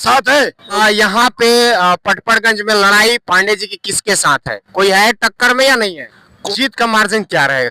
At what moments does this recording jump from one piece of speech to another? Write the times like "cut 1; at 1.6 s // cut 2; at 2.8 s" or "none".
cut 1; at 0.8 s // cut 2; at 6.3 s